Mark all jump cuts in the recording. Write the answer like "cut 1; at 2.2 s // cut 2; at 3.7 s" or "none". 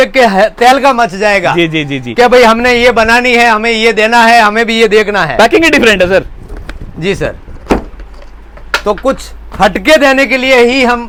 none